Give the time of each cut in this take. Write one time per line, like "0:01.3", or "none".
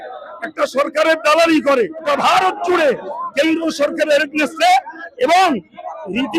0:02.1